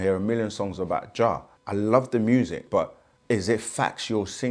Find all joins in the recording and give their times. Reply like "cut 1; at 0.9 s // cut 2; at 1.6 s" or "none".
cut 1; at 1.5 s // cut 2; at 2.7 s